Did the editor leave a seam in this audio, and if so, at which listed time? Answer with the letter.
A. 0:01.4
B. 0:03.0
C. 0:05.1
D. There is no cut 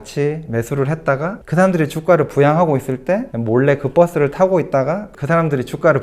A